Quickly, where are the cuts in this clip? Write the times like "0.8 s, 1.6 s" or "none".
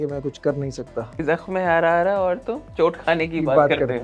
1.2 s